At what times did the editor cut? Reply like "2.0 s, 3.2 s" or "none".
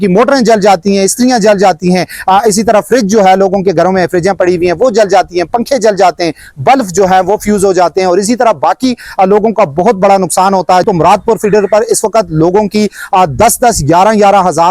10.9 s

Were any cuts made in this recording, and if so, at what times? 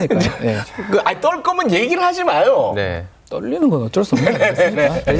none

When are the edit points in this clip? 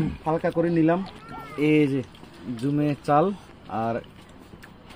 1.1 s

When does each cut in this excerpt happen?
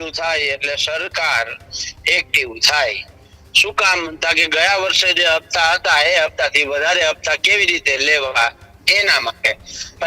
none

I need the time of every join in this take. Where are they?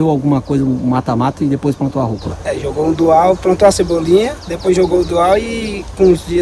none

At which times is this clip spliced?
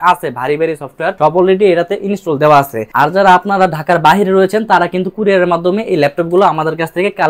1.1 s, 2.8 s

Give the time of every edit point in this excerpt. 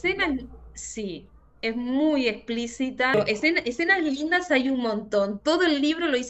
3.1 s

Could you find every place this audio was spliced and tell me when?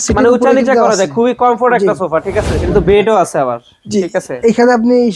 2.6 s

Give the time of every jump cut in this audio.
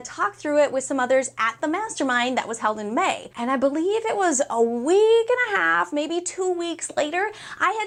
none

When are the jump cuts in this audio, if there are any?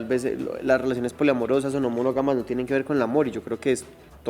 none

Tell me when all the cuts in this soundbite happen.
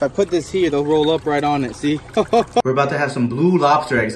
2.6 s

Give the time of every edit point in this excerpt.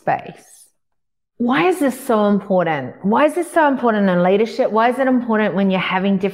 none

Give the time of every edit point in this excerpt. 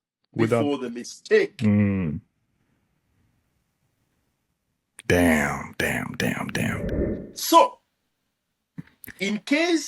6.8 s

